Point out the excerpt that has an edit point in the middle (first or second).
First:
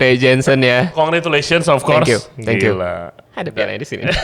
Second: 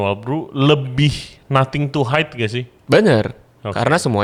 first